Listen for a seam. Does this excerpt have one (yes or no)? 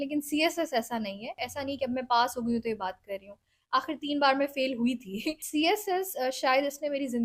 yes